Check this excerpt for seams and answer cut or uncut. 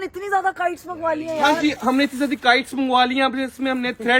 uncut